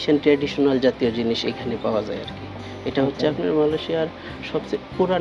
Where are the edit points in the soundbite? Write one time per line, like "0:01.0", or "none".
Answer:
none